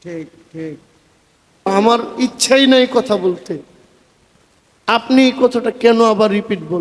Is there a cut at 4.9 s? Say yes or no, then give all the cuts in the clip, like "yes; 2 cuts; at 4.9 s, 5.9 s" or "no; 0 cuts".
no; 1 cut; at 1.7 s